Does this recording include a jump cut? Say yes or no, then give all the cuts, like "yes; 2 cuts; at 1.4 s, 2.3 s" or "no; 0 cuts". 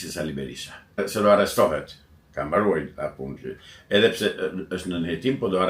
yes; 1 cut; at 1.0 s